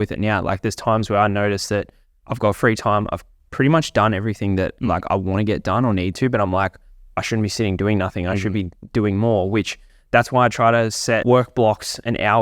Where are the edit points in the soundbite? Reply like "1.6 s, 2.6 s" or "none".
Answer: 11.2 s